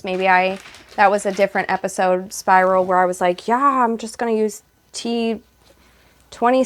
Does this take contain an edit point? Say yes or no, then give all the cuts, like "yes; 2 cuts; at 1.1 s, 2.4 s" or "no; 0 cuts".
no; 0 cuts